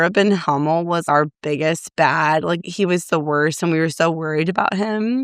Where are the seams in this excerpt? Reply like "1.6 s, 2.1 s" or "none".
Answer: 1.0 s